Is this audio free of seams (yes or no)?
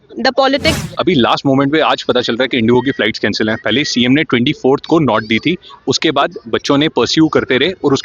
no